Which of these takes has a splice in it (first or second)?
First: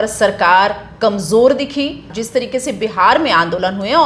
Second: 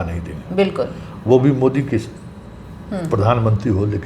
first